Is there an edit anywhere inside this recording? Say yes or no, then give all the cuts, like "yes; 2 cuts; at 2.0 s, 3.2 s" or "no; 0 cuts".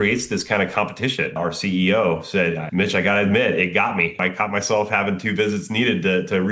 yes; 3 cuts; at 1.4 s, 2.6 s, 4.2 s